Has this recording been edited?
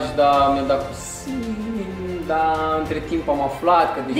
no; 0 cuts

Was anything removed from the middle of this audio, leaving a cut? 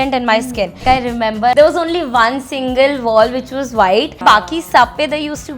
yes; 2 cuts; at 1.2 s, 4.2 s

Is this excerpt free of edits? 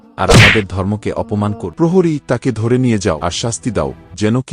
no; 2 cuts; at 1.6 s, 3.2 s

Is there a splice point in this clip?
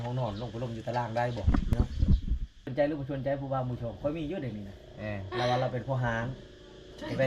yes; 2 cuts; at 1.7 s, 2.7 s

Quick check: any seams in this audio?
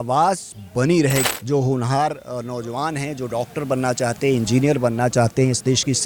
yes; 1 cut; at 1.3 s

